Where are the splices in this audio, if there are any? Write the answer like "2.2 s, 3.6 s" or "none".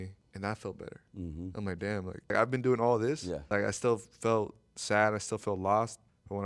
2.3 s, 3.5 s